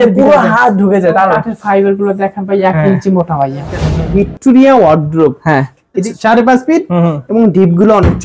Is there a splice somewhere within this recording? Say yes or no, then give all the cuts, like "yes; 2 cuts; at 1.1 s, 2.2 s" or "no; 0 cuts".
yes; 2 cuts; at 4.1 s, 6.0 s